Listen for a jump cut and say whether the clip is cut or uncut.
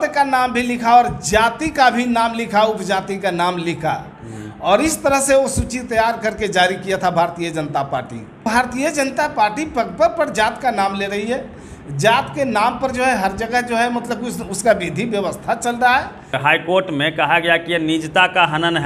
cut